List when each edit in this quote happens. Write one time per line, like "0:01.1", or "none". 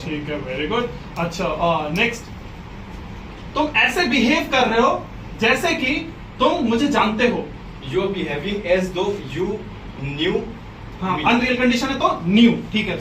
none